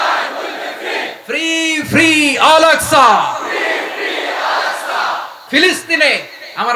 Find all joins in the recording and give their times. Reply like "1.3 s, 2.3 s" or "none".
5.3 s